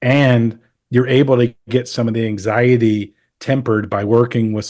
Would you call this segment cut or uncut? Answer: uncut